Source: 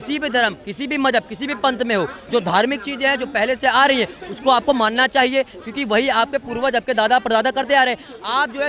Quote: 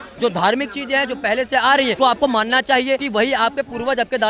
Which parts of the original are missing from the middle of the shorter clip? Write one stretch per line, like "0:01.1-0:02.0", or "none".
0:04.1-0:04.4
0:05.5-0:05.8

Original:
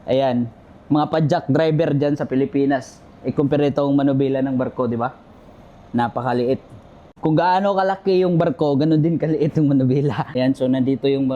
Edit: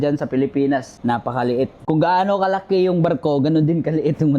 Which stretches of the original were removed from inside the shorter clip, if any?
0:02.9-0:05.8
0:06.7-0:07.1

